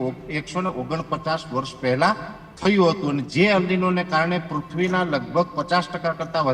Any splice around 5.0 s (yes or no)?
no